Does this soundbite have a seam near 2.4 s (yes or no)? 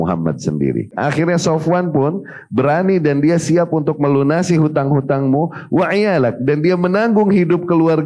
no